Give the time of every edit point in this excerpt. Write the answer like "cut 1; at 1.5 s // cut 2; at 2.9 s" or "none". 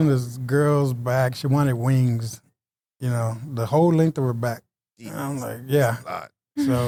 none